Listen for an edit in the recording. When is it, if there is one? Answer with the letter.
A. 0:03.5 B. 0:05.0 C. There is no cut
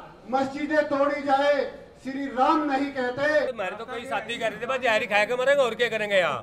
A